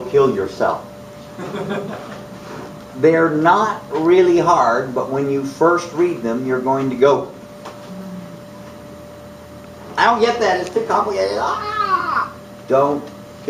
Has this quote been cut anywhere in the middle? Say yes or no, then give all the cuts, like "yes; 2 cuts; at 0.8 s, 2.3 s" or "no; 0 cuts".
no; 0 cuts